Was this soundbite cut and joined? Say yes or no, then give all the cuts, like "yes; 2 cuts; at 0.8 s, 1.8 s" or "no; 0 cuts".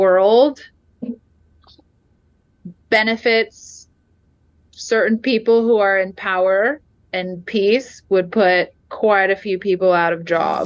no; 0 cuts